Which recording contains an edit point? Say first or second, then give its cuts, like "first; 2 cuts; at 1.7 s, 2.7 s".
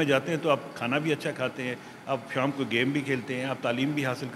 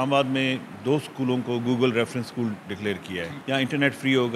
second; 1 cut; at 3.3 s